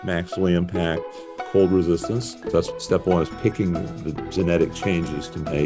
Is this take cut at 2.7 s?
yes; 1 cut; at 2.7 s

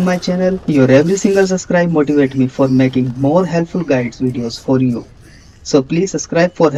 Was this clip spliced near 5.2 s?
yes; 1 cut; at 5.2 s

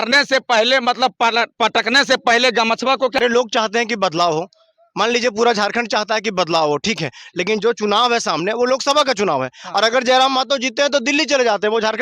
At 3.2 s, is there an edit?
yes; 1 cut; at 3.2 s

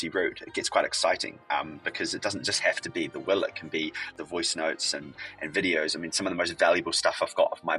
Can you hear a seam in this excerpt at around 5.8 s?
no; 1 cut; at 4.1 s

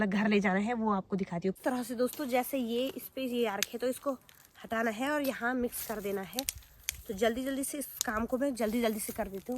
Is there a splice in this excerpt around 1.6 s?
yes; 1 cut; at 1.6 s

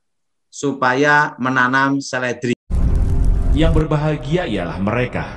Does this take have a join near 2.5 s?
yes; 1 cut; at 2.5 s

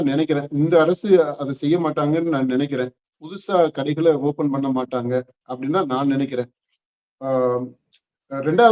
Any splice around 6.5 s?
no; 0 cuts

